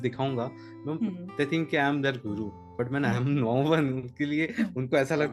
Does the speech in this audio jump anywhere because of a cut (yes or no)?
no